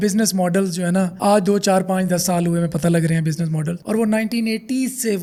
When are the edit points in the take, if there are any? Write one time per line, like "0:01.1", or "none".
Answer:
none